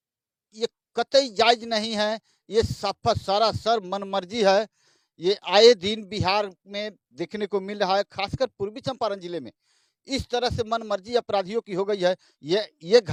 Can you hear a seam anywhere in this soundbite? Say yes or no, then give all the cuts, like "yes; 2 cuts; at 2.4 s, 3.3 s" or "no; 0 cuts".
no; 0 cuts